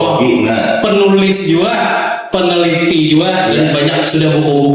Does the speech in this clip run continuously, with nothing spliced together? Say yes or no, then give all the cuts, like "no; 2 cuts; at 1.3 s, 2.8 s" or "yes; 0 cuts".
yes; 0 cuts